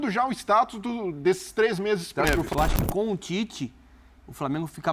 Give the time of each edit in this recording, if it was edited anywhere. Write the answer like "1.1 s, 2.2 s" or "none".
2.5 s